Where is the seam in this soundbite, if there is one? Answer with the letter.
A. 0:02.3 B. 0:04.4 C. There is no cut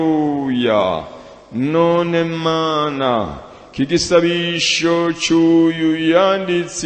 C